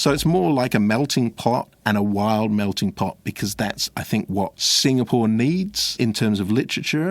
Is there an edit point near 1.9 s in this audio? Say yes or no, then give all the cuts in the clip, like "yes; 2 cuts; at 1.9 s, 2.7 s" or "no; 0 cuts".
no; 2 cuts; at 4.6 s, 5.9 s